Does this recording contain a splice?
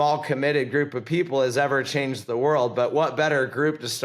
no; 0 cuts

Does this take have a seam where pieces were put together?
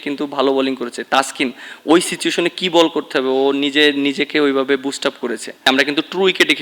yes; 1 cut; at 5.6 s

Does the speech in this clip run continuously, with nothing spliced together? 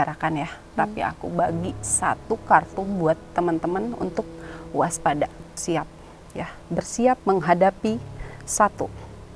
no; 1 cut; at 5.6 s

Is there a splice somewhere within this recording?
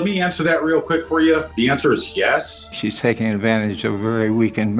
yes; 2 cuts; at 1.5 s, 2.6 s

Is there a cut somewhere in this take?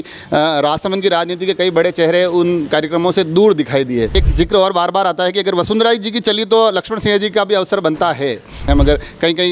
yes; 2 cuts; at 4.1 s, 8.7 s

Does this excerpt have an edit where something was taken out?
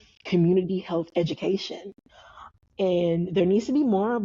yes; 1 cut; at 2.5 s

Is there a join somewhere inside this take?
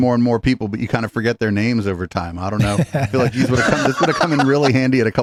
no; 0 cuts

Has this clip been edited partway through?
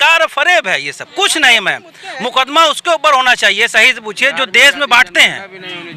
no; 0 cuts

